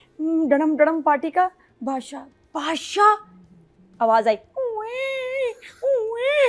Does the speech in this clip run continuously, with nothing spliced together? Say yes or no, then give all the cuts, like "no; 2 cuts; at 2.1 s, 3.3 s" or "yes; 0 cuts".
yes; 0 cuts